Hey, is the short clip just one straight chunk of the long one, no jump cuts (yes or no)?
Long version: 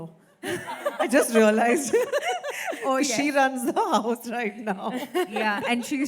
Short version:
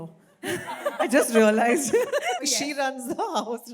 no